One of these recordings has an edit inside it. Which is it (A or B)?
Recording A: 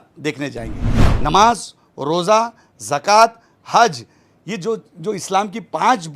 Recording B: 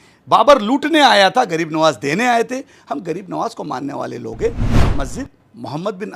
A